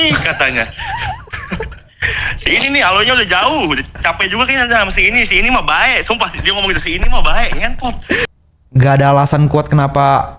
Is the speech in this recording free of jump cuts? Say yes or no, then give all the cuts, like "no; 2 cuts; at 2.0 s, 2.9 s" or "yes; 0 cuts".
no; 1 cut; at 8.3 s